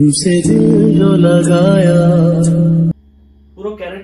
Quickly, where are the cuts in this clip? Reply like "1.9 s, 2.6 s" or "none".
2.9 s

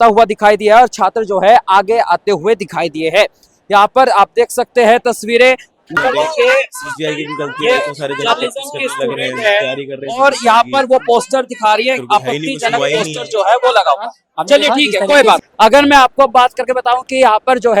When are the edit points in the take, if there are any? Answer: 6.0 s, 15.5 s

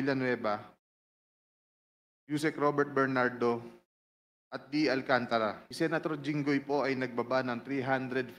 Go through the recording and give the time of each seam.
5.6 s

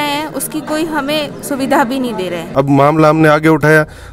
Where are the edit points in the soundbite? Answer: 2.5 s

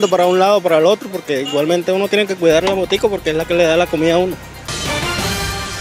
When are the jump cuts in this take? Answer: 4.5 s

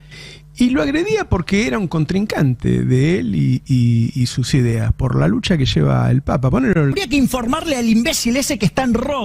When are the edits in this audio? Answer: 7.0 s

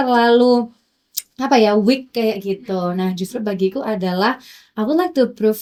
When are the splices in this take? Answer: none

